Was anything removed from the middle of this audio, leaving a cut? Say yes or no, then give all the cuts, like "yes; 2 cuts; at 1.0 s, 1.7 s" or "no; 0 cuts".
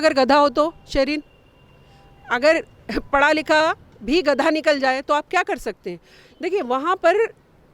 no; 0 cuts